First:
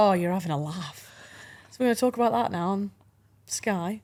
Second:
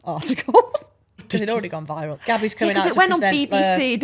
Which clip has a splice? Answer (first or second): second